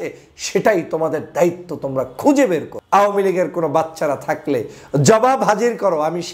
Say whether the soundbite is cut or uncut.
cut